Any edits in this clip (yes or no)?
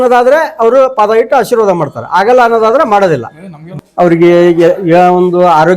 yes